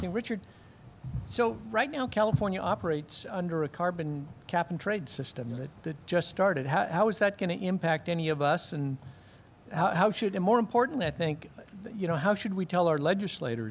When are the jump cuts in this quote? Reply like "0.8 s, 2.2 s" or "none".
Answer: none

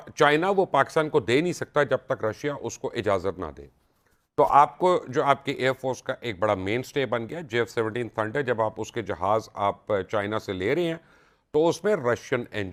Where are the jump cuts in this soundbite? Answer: none

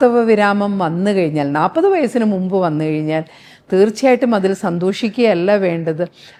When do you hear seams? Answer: none

